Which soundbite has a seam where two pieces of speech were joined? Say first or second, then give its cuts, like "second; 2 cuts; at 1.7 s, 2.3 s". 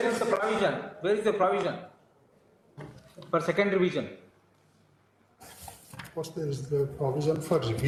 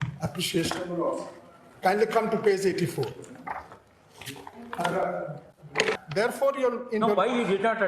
second; 1 cut; at 6.0 s